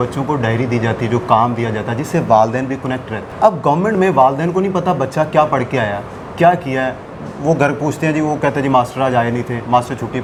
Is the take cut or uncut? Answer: uncut